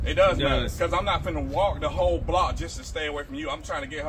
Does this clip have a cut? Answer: no; 0 cuts

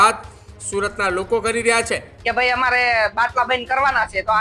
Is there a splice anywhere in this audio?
yes; 1 cut; at 2.1 s

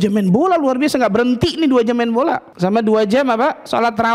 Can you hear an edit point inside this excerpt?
yes; 1 cut; at 2.5 s

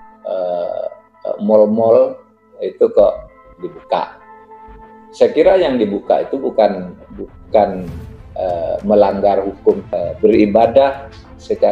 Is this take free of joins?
no; 1 cut; at 9.9 s

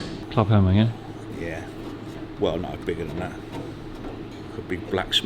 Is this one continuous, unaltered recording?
no; 2 cuts; at 2.2 s, 4.3 s

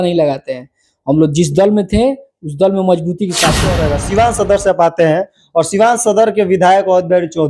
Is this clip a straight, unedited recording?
no; 1 cut; at 3.9 s

